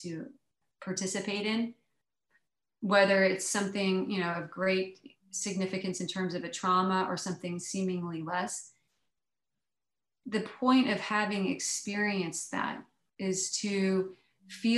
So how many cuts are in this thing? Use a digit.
0